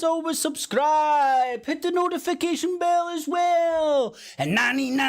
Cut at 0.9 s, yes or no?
no